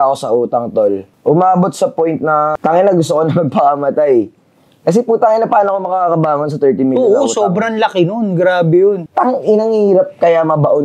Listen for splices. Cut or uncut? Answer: cut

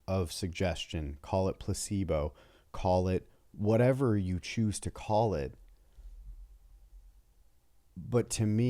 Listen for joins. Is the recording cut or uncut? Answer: uncut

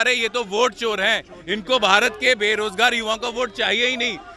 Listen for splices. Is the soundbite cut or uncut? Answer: uncut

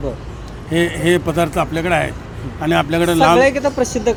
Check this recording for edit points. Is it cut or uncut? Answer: uncut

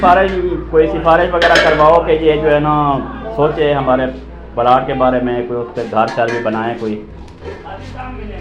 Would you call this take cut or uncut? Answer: uncut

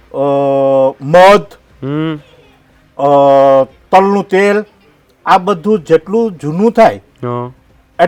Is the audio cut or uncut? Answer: uncut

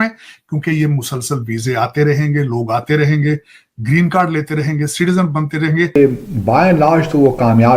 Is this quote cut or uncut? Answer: cut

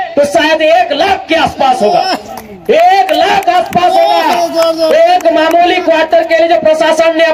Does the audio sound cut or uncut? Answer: uncut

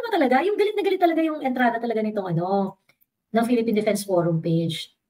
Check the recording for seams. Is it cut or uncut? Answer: cut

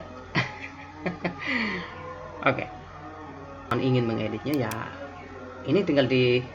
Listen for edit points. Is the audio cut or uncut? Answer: cut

